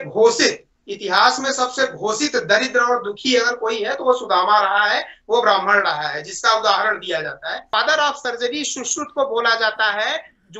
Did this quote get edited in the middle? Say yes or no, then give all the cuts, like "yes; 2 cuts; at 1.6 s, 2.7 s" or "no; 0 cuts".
yes; 1 cut; at 7.7 s